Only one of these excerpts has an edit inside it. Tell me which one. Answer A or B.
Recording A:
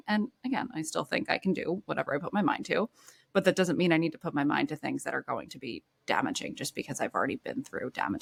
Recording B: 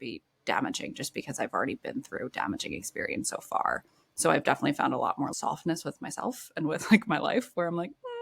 B